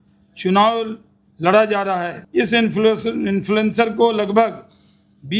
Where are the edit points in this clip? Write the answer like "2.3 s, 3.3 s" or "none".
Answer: 2.2 s